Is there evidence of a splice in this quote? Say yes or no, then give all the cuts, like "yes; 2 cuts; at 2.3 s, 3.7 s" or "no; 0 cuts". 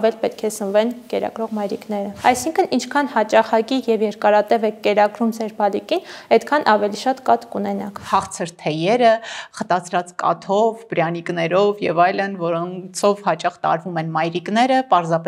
yes; 2 cuts; at 2.1 s, 8.0 s